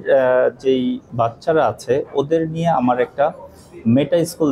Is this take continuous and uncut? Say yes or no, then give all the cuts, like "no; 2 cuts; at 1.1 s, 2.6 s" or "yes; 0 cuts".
yes; 0 cuts